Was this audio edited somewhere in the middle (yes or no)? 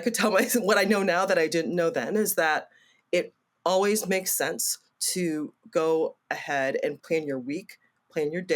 yes